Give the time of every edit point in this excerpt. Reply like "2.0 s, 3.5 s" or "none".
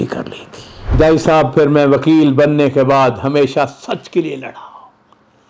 0.9 s

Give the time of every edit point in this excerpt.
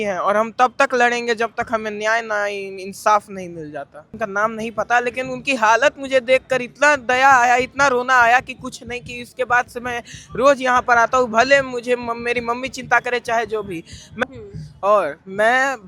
4.1 s, 14.2 s

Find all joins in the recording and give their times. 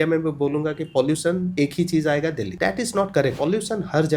1.5 s, 2.5 s, 3.3 s

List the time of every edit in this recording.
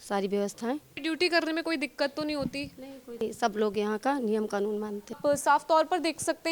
0.9 s, 3.2 s, 5.2 s

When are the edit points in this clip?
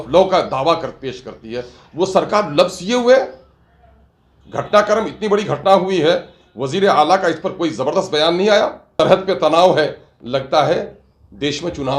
8.9 s

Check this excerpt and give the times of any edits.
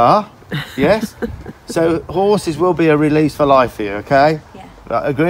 none

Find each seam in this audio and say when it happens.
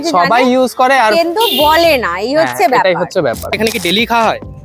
3.6 s

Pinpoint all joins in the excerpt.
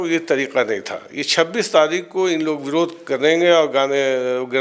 none

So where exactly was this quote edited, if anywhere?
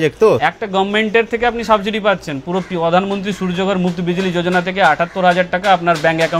none

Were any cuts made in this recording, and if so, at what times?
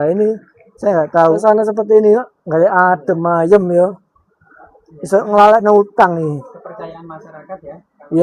1.4 s

